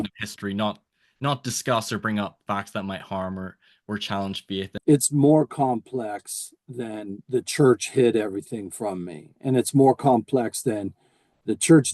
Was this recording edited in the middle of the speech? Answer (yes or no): yes